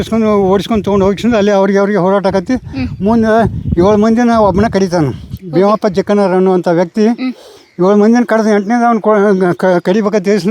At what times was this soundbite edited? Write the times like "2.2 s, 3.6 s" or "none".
none